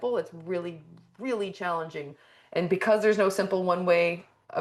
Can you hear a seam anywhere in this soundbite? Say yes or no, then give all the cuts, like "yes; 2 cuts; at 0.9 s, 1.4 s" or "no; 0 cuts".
no; 0 cuts